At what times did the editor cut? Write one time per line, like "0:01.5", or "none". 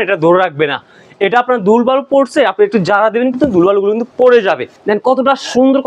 0:04.7